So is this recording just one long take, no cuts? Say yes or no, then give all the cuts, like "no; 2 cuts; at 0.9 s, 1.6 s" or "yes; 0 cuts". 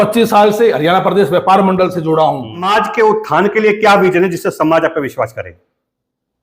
no; 1 cut; at 2.6 s